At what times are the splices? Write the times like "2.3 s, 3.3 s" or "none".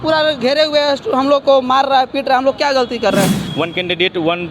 3.4 s